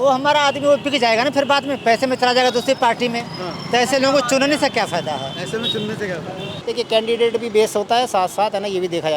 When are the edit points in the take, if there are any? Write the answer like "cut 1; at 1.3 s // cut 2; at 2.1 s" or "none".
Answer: cut 1; at 6.6 s

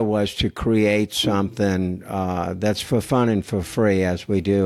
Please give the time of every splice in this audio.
none

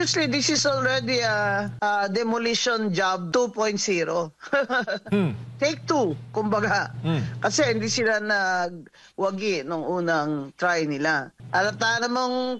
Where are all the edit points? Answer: cut 1; at 1.7 s // cut 2; at 3.2 s // cut 3; at 11.3 s

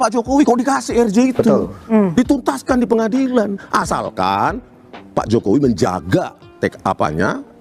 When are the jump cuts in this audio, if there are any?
none

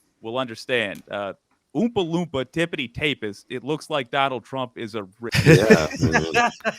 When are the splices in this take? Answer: cut 1; at 5.2 s

